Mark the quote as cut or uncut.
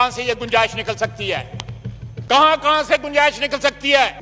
uncut